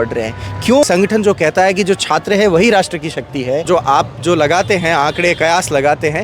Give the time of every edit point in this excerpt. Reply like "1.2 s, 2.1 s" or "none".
0.8 s, 3.7 s

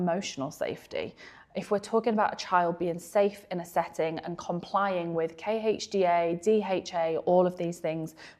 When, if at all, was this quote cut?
none

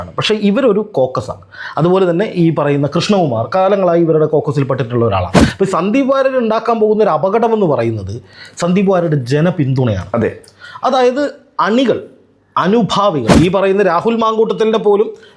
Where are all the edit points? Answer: 5.4 s, 13.3 s

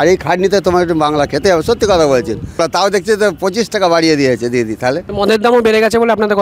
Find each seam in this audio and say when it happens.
2.6 s, 5.1 s

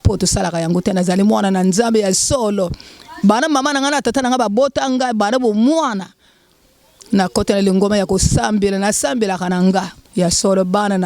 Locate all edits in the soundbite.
10.0 s

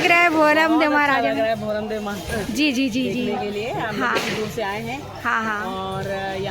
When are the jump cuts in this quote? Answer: none

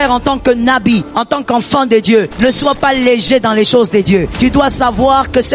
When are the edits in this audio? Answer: 1.1 s, 2.3 s, 4.3 s

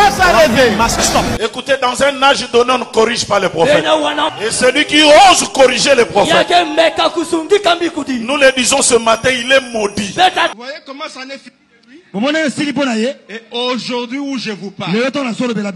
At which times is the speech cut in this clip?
1.3 s, 4.3 s, 10.5 s

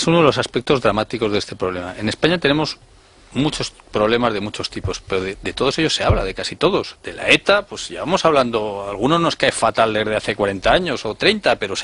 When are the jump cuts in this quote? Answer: 1.9 s

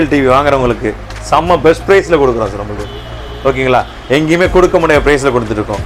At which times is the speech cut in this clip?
none

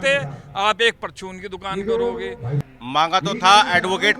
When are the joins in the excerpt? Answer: 2.5 s

